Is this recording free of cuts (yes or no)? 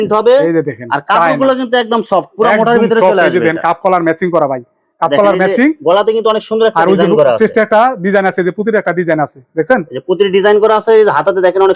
yes